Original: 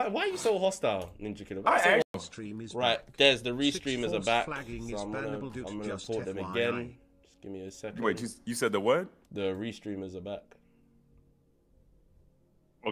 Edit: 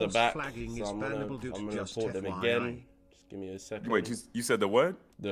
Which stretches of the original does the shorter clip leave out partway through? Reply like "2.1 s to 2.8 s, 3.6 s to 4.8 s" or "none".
none